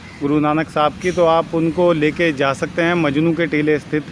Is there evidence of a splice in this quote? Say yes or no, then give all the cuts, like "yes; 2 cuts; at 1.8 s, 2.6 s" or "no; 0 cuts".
no; 0 cuts